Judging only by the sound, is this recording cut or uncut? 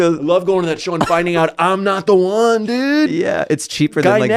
uncut